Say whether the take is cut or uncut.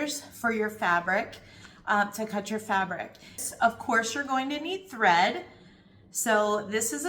cut